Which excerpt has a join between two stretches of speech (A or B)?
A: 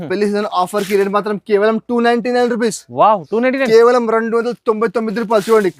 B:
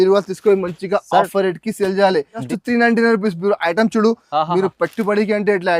B